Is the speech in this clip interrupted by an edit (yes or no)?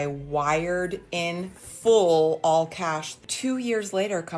yes